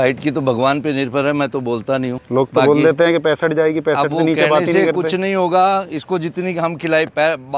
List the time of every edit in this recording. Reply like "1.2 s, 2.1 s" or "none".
2.2 s